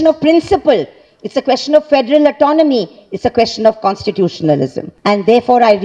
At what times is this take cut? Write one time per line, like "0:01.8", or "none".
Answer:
0:04.9